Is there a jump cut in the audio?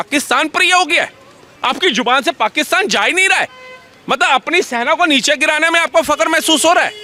no; 0 cuts

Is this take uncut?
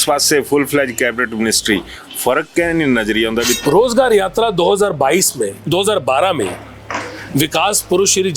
no; 1 cut; at 3.6 s

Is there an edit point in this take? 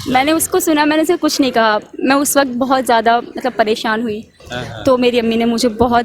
yes; 1 cut; at 4.4 s

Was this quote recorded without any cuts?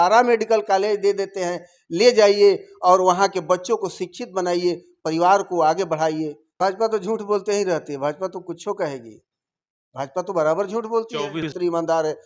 no; 2 cuts; at 6.4 s, 11.5 s

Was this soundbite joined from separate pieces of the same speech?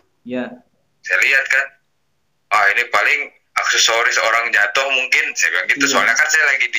no; 0 cuts

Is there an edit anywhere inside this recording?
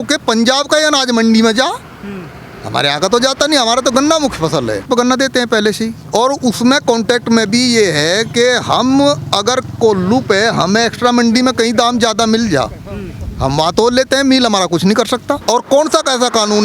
yes; 2 cuts; at 4.8 s, 15.4 s

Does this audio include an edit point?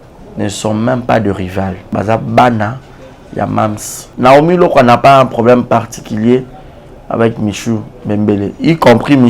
yes; 2 cuts; at 1.8 s, 4.1 s

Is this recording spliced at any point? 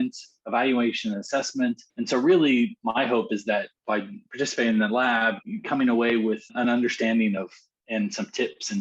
yes; 4 cuts; at 1.9 s, 2.8 s, 3.7 s, 5.5 s

